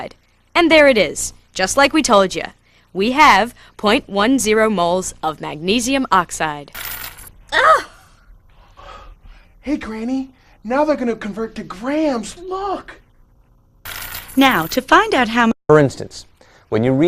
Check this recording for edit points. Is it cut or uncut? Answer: cut